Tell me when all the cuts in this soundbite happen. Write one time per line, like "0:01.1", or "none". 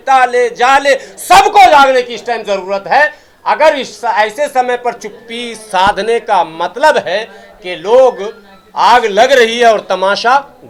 none

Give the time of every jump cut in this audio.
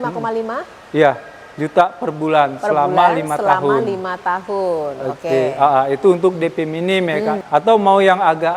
0:07.4

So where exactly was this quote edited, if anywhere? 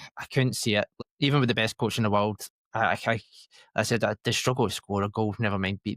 0:00.9

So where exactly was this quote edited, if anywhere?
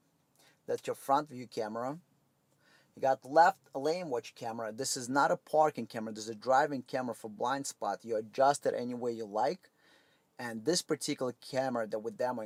none

